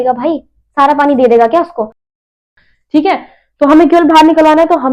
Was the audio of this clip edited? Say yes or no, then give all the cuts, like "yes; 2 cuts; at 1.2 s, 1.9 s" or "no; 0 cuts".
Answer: no; 0 cuts